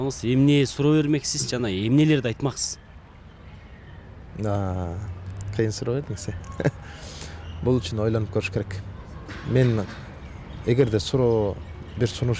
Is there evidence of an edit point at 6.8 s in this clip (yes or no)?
no